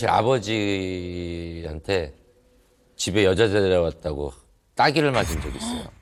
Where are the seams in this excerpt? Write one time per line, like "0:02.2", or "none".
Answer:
none